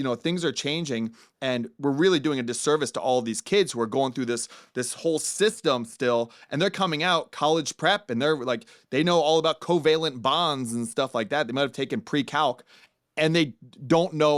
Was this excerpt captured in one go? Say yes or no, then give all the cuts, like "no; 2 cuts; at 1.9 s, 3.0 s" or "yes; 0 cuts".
yes; 0 cuts